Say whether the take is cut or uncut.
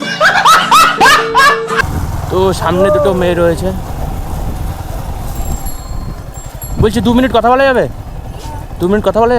cut